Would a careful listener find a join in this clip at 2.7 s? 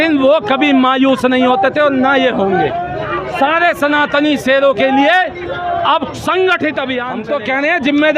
no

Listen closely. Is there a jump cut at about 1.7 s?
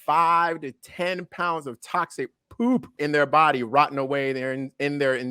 no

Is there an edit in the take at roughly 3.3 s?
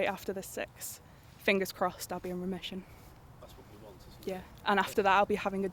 no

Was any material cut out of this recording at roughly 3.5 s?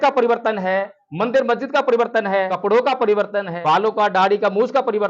yes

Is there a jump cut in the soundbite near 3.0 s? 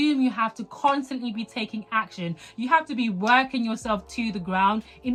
no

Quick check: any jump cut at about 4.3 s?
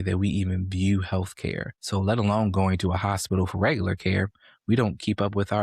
no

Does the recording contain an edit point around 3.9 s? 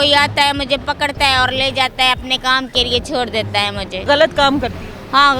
yes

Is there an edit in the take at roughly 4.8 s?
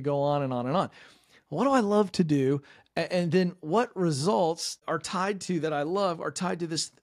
yes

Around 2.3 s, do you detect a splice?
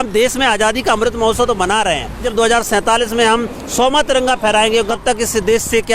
yes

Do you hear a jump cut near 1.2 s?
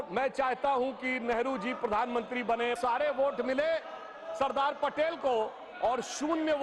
no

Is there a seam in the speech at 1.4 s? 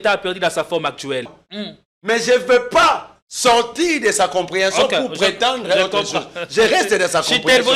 yes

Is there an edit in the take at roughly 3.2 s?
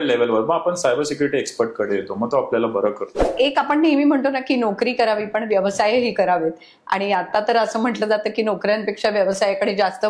yes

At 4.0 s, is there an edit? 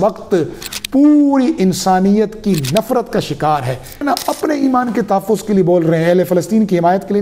yes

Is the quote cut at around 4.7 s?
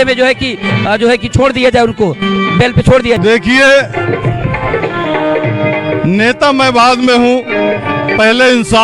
no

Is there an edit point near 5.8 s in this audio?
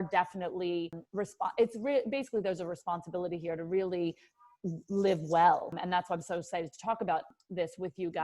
yes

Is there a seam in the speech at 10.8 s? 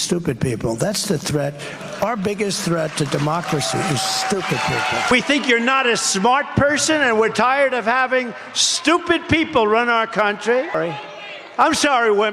yes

